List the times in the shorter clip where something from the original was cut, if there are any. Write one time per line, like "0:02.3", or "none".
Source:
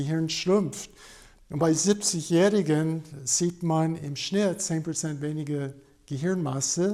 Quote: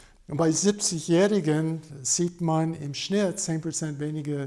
none